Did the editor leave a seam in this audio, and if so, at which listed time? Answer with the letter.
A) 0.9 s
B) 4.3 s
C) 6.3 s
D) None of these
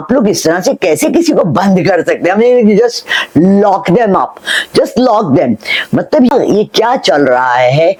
D